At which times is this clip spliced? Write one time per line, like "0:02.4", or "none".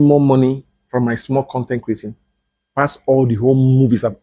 none